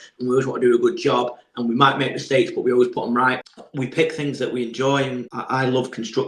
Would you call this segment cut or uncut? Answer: cut